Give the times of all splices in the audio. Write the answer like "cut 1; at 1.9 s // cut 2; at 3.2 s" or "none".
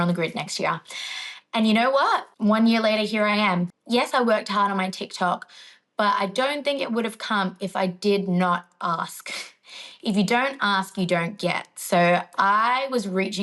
cut 1; at 2.3 s // cut 2; at 3.7 s